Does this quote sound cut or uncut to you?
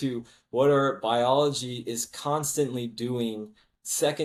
uncut